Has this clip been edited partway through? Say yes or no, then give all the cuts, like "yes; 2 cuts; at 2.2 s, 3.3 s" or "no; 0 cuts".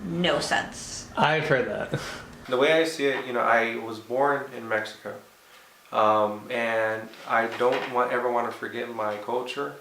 yes; 1 cut; at 2.2 s